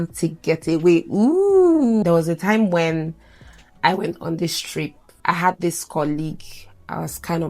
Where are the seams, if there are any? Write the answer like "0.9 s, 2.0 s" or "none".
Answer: 2.0 s, 5.1 s